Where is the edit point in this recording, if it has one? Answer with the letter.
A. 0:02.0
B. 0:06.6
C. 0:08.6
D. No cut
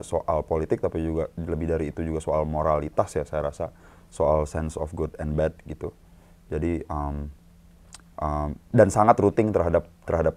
D